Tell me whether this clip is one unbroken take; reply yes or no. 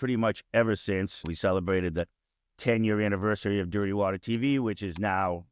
no